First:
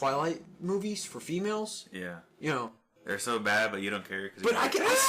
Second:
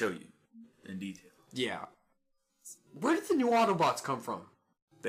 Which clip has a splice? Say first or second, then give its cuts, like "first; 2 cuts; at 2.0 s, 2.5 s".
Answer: first; 1 cut; at 1.1 s